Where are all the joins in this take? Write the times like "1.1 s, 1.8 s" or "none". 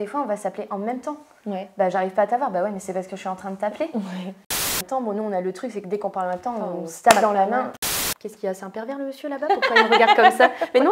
4.5 s, 7.9 s